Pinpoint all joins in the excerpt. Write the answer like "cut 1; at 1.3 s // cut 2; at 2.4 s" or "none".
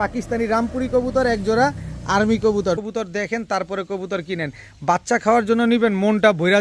cut 1; at 2.8 s